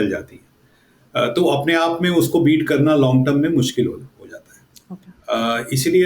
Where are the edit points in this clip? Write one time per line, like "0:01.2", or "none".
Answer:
none